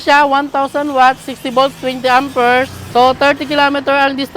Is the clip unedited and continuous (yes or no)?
no